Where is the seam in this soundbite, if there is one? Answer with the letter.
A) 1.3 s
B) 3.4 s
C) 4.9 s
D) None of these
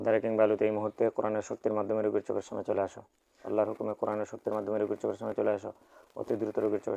B